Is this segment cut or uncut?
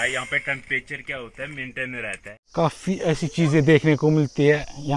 cut